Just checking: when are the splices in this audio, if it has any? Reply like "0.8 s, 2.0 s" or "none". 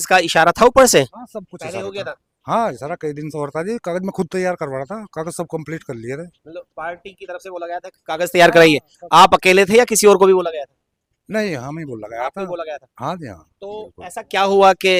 none